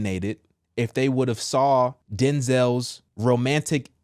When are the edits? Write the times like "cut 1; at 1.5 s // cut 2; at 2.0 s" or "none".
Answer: cut 1; at 2.0 s // cut 2; at 3.0 s